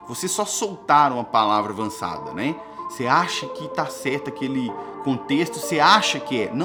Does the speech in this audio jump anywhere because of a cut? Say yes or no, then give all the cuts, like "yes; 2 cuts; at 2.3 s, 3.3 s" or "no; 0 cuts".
no; 0 cuts